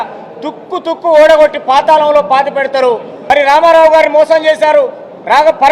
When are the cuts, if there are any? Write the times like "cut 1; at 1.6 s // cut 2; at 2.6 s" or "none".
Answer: cut 1; at 3.1 s

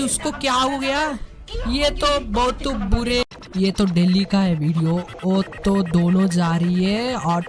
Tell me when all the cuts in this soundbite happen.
cut 1; at 3.3 s

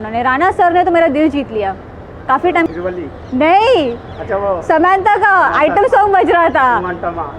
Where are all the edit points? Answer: cut 1; at 2.7 s

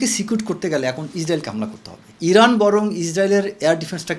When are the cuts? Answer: cut 1; at 2.1 s

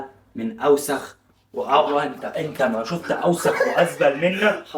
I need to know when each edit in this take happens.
none

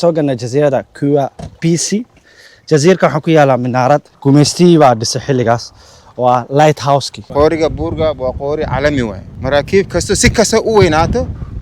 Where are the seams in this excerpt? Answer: cut 1; at 4.1 s // cut 2; at 7.2 s // cut 3; at 9.3 s

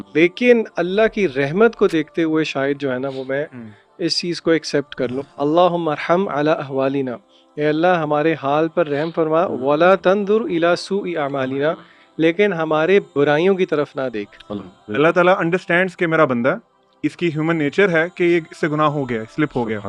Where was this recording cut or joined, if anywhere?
cut 1; at 5.2 s // cut 2; at 14.6 s

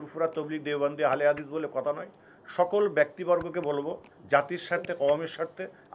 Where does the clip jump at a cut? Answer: none

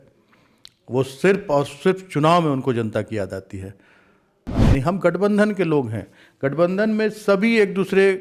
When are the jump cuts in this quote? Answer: cut 1; at 4.6 s

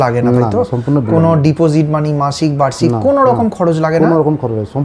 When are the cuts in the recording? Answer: none

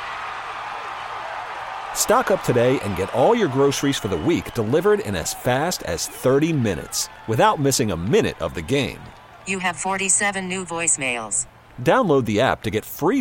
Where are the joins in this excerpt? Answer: none

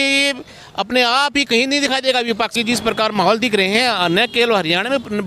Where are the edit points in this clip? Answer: cut 1; at 2.6 s

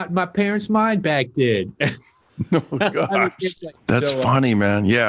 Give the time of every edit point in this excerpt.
cut 1; at 3.6 s

